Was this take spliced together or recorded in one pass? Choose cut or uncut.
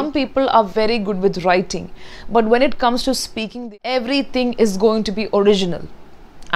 cut